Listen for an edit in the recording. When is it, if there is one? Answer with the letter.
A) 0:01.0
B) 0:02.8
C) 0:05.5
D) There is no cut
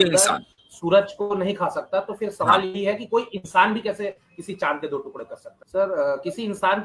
C